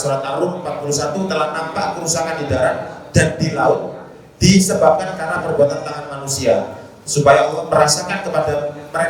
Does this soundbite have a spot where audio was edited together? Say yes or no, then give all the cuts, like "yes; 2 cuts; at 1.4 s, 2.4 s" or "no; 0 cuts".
yes; 1 cut; at 7.6 s